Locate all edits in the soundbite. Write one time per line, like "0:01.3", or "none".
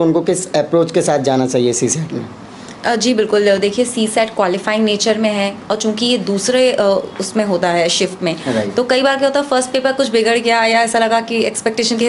none